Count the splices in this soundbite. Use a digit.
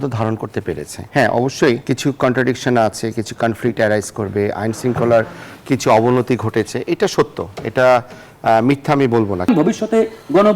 3